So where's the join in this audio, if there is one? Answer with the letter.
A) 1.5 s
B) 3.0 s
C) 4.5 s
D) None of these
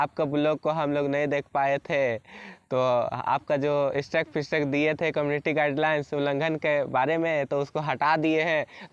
D